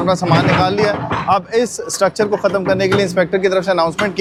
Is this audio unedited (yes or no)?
yes